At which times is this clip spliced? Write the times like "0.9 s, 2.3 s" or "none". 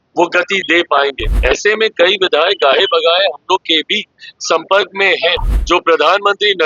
1.3 s, 5.5 s